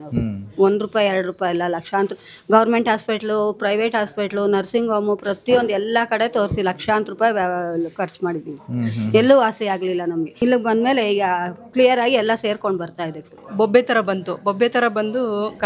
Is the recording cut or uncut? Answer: cut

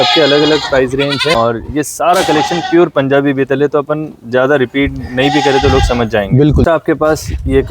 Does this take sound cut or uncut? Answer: cut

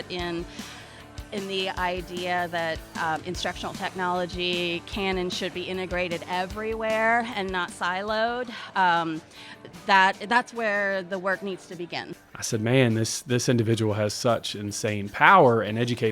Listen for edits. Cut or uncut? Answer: cut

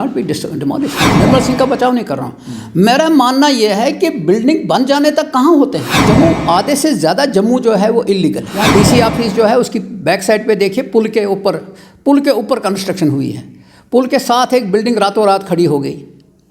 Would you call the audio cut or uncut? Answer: cut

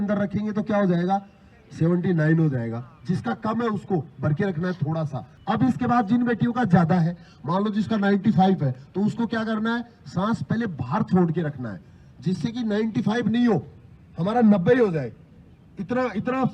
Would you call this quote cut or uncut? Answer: cut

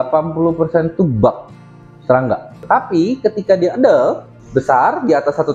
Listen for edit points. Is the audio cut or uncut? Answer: cut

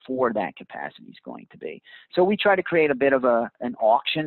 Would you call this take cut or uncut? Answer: uncut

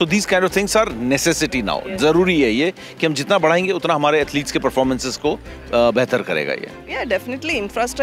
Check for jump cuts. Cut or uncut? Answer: uncut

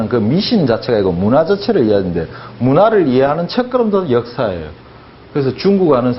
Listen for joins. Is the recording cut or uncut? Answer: cut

